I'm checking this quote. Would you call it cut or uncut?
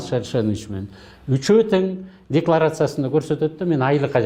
uncut